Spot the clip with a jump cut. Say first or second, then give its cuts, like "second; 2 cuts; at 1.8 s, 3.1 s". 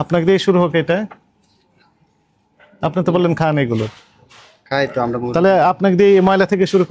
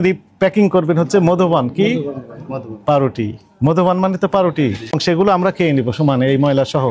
second; 1 cut; at 5.0 s